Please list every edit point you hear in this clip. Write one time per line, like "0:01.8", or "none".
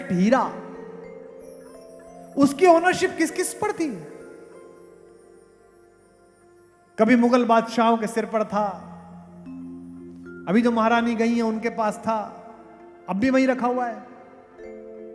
none